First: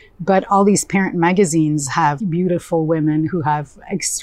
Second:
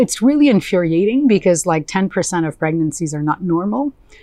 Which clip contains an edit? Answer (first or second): first